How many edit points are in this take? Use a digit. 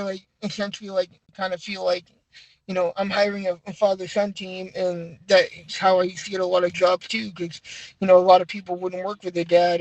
1